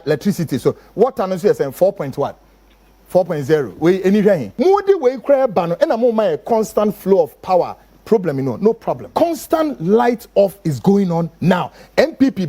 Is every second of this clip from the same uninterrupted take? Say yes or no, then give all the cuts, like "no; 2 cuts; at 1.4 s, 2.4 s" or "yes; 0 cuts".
no; 2 cuts; at 4.5 s, 9.0 s